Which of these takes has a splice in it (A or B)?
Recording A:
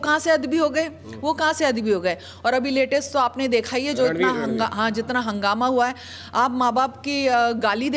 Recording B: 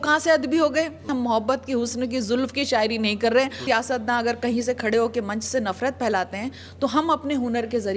B